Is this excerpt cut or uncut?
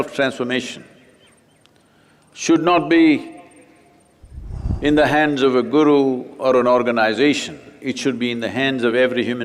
uncut